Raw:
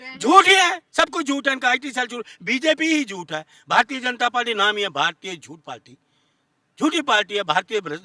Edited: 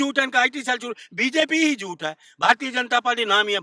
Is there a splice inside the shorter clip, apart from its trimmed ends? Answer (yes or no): no